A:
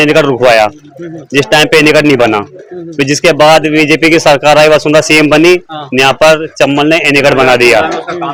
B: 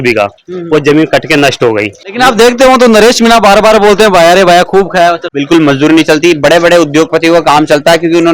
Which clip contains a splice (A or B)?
B